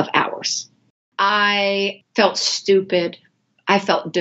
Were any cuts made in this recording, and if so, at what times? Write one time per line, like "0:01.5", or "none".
0:01.1
0:02.0